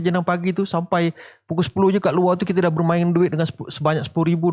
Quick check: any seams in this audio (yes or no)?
no